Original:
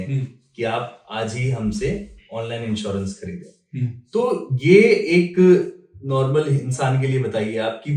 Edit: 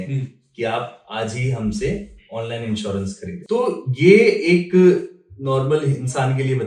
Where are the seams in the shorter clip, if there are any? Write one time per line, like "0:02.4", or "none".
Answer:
0:03.4